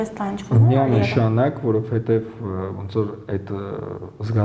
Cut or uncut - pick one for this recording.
uncut